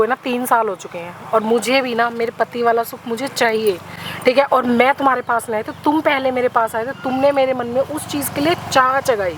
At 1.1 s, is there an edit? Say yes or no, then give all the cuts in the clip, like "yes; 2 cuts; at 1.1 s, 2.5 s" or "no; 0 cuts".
no; 0 cuts